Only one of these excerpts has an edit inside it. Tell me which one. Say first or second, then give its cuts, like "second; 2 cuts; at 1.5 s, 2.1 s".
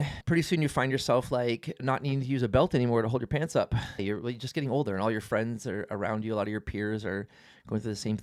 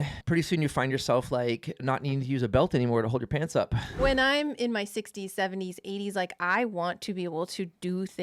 second; 1 cut; at 4.0 s